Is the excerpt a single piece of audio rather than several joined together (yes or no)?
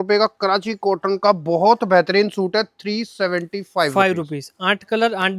yes